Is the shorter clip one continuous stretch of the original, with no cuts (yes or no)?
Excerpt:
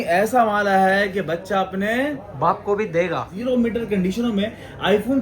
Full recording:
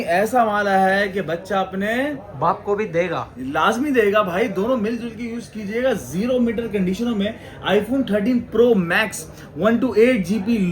no